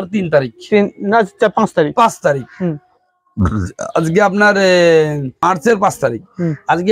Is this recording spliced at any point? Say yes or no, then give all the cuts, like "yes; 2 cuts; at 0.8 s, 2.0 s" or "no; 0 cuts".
yes; 1 cut; at 5.4 s